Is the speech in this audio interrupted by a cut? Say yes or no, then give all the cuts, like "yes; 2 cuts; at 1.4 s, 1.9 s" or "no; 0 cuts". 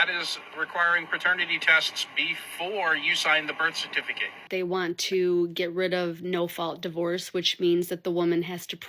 yes; 1 cut; at 4.5 s